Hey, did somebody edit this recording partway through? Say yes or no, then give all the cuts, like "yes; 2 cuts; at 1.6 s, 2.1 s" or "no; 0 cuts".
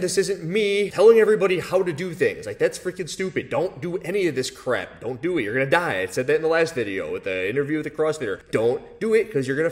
yes; 1 cut; at 0.9 s